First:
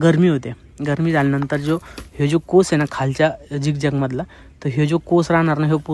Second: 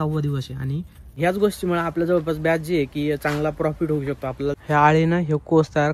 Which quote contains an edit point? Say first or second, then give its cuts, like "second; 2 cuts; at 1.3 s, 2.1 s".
second; 2 cuts; at 1.1 s, 4.6 s